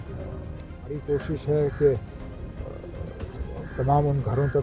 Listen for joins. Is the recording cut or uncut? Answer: cut